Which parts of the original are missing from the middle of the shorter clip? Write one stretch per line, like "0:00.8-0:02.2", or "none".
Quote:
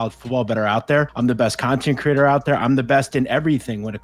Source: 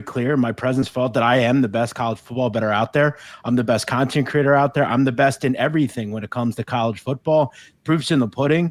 0:03.2-0:03.4